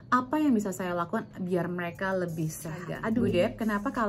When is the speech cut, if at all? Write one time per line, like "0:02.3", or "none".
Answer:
0:03.2